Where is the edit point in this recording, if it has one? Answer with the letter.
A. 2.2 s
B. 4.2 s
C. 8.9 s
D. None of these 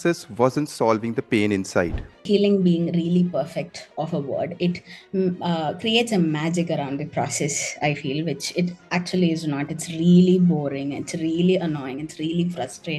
A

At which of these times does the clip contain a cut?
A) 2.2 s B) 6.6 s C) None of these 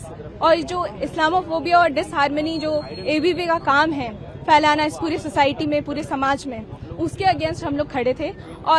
C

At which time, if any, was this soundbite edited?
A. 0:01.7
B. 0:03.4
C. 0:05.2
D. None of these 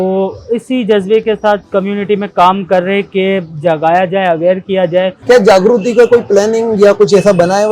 C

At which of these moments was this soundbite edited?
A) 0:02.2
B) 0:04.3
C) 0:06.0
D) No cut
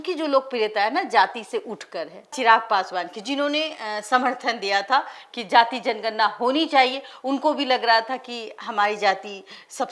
D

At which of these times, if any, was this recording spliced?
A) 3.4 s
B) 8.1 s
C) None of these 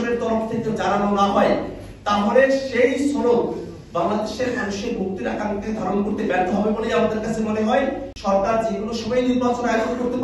B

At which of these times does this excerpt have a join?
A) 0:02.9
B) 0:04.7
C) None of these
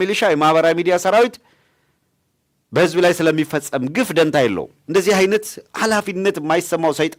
B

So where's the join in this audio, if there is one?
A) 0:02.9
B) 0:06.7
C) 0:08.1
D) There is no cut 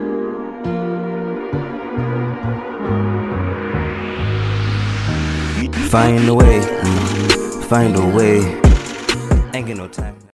D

